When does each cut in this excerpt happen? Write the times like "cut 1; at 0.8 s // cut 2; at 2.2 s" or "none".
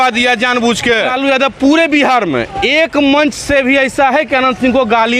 cut 1; at 1.1 s